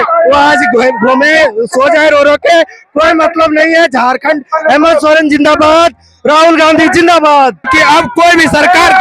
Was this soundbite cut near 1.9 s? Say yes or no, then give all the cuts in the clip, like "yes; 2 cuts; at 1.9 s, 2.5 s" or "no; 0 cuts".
no; 1 cut; at 7.7 s